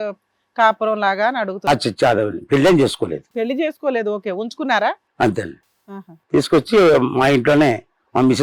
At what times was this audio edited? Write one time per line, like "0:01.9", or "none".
none